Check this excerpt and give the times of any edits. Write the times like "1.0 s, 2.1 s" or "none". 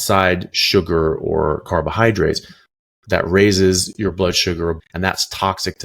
4.8 s